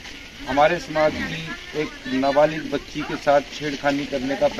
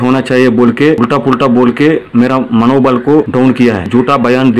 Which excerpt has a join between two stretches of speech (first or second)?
second